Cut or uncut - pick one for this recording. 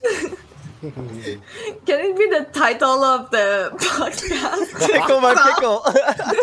cut